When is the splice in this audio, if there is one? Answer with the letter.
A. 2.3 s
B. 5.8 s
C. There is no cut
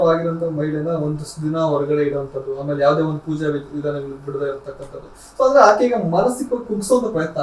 C